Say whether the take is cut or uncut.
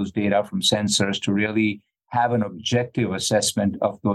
uncut